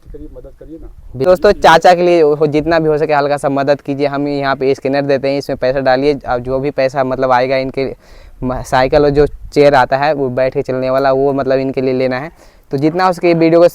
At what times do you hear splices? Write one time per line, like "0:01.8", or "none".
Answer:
0:01.3